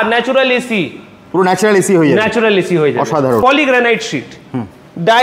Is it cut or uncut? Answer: cut